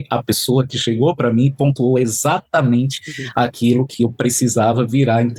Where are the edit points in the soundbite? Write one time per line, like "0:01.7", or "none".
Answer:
none